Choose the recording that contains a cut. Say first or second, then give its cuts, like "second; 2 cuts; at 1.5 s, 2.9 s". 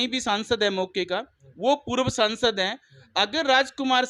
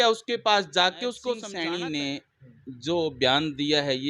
second; 1 cut; at 1.5 s